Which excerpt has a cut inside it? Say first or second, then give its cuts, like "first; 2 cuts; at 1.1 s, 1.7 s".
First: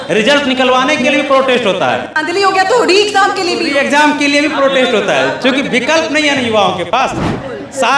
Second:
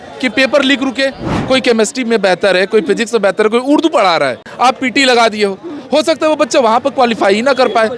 second; 2 cuts; at 1.3 s, 4.4 s